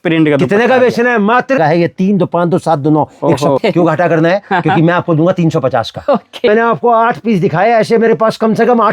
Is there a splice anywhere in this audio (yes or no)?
yes